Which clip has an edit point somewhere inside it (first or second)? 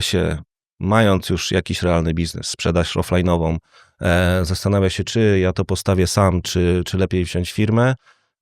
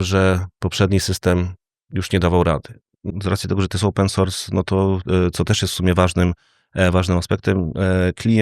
second